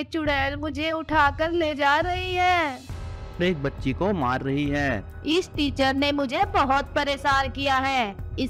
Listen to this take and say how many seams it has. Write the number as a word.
two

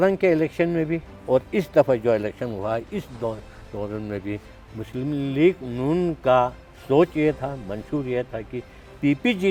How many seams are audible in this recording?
zero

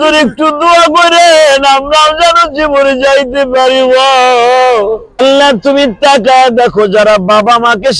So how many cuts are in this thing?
one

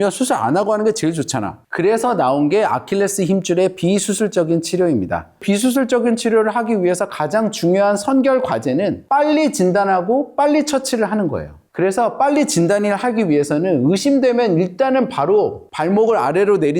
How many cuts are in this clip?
two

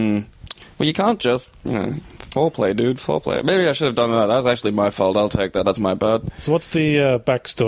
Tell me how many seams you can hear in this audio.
zero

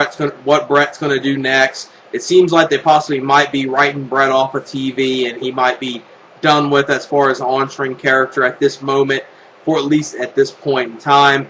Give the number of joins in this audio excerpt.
zero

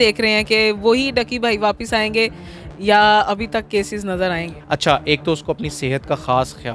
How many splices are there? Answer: one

